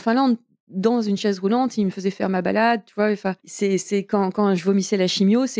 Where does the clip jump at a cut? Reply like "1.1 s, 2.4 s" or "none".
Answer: 3.5 s